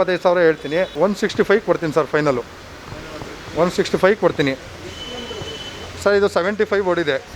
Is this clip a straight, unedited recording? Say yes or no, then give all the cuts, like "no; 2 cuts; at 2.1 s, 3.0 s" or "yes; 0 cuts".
yes; 0 cuts